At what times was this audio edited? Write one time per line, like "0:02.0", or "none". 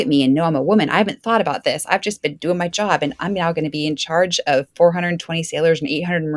none